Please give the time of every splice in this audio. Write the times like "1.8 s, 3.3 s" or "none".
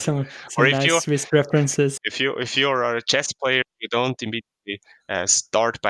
2.1 s